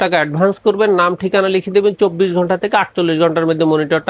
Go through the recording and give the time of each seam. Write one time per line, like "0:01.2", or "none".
none